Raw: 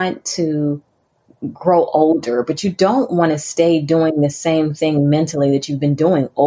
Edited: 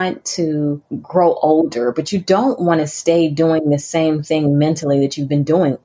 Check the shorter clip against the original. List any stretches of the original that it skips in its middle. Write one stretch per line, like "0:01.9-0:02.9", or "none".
0:00.9-0:01.4